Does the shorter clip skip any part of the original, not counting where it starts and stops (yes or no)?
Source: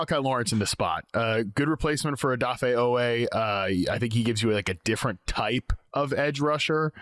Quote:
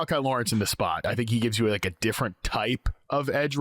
yes